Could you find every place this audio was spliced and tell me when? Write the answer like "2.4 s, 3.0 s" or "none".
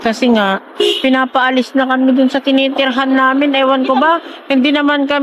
none